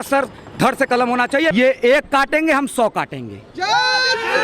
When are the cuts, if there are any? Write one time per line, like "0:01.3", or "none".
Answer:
0:01.5